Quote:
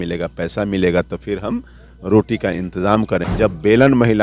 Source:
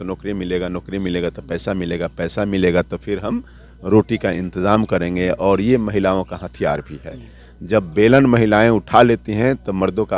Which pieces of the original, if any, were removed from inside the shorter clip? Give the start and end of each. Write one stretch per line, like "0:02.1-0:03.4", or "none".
0:05.0-0:07.6